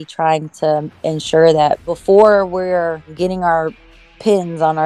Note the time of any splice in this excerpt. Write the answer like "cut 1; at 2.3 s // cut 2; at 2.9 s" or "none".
cut 1; at 1.9 s